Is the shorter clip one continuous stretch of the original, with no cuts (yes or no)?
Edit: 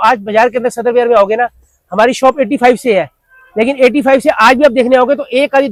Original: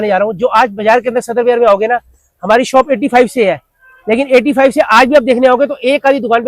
yes